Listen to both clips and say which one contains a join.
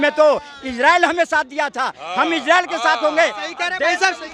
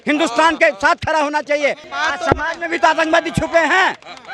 second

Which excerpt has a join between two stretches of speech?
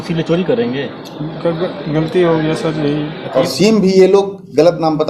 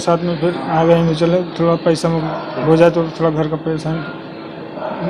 first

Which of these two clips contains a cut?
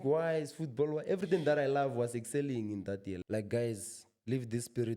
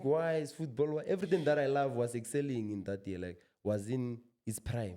first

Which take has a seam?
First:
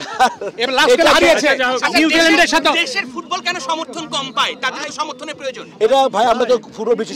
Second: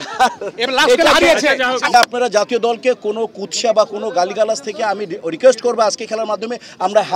second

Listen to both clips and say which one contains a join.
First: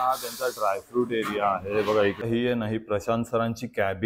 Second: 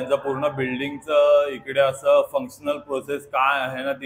first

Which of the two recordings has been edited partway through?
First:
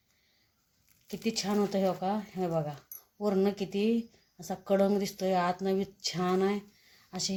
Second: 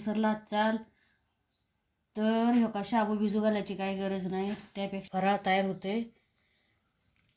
second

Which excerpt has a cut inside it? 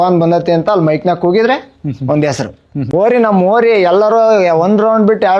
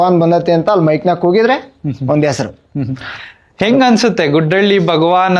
first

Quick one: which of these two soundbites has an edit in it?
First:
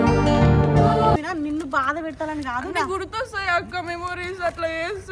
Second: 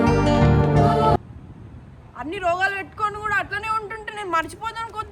first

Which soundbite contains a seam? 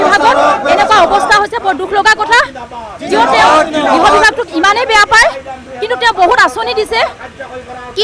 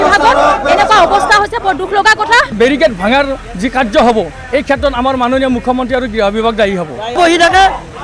second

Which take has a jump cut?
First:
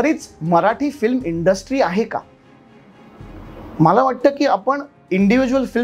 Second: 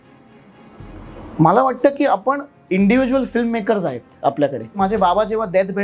second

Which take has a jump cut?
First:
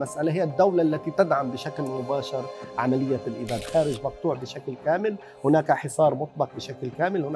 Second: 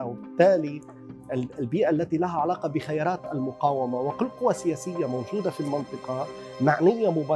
first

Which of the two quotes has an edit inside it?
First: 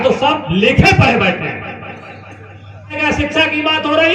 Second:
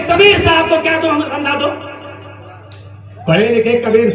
first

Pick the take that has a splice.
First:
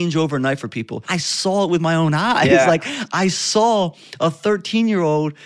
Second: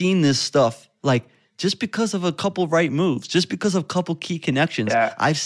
first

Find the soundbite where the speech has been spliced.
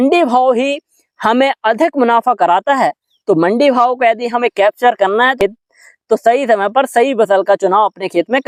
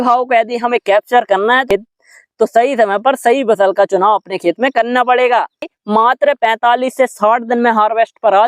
second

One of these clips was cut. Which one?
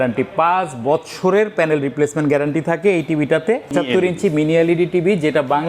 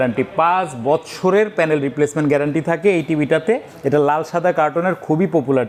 first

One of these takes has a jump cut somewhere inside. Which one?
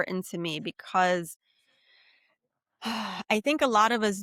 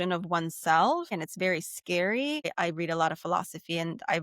second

